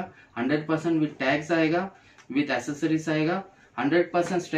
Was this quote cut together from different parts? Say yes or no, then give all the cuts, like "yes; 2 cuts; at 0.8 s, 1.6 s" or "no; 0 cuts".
no; 0 cuts